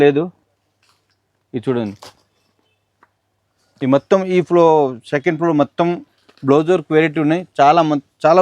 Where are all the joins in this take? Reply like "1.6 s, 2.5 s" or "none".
none